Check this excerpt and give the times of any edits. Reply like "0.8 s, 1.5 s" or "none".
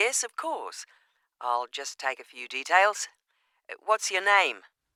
none